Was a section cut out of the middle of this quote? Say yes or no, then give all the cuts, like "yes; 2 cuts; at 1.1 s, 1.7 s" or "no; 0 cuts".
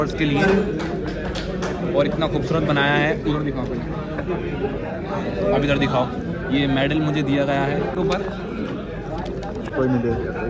yes; 2 cuts; at 7.9 s, 9.7 s